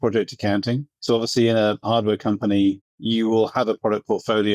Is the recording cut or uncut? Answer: cut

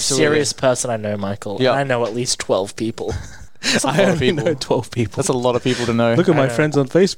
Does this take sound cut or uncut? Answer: uncut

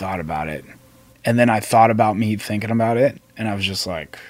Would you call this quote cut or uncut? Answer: uncut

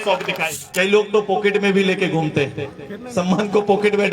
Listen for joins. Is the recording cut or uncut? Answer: cut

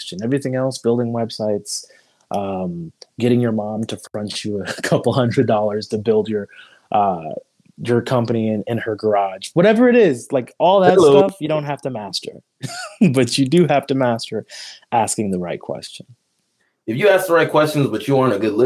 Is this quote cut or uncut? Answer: cut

